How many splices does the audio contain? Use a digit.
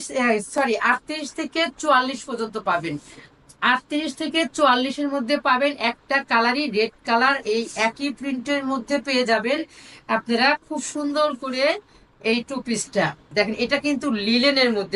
1